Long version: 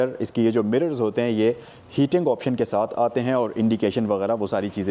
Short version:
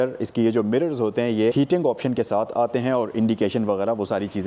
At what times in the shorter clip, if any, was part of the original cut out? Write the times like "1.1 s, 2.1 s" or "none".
1.5 s